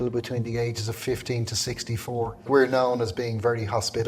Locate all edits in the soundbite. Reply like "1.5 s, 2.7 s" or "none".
2.4 s